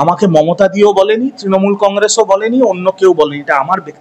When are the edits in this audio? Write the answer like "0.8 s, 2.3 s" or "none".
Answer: none